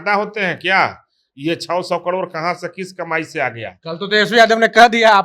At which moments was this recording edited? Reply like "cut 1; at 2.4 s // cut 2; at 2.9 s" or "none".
none